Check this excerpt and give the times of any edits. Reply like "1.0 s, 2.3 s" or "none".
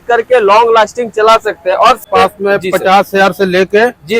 2.0 s